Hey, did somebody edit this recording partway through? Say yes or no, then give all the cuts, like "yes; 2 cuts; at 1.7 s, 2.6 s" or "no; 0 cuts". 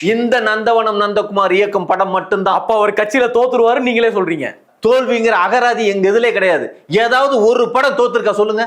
no; 0 cuts